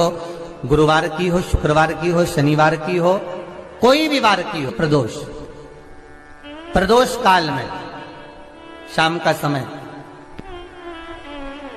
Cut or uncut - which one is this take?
cut